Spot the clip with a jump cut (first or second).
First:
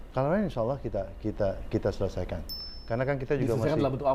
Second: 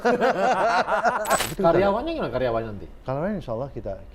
second